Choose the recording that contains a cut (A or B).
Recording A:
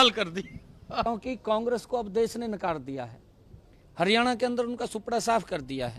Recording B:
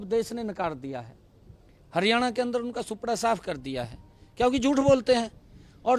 A